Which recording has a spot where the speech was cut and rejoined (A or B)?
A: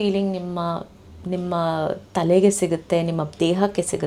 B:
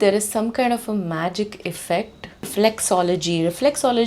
B